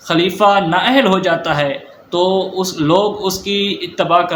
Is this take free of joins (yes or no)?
yes